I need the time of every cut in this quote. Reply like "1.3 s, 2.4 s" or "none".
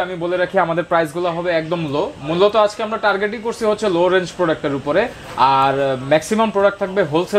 none